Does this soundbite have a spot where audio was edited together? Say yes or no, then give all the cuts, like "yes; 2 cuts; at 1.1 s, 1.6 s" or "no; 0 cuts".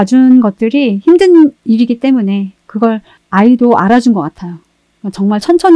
no; 0 cuts